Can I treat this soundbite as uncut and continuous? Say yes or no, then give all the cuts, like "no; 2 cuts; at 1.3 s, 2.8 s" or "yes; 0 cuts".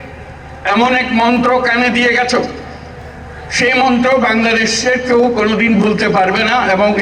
yes; 0 cuts